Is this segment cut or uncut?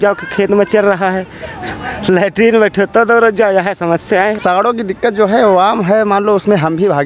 cut